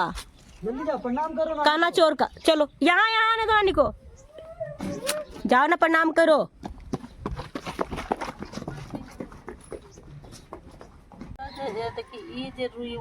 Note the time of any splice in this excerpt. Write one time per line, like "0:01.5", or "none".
0:11.4